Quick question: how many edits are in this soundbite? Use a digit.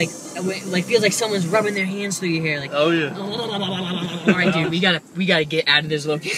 1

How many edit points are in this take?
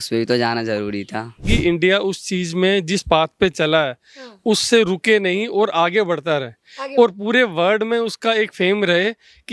1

